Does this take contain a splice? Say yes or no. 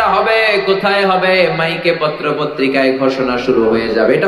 no